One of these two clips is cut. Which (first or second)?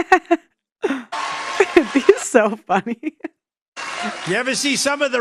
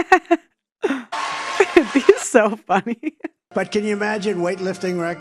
second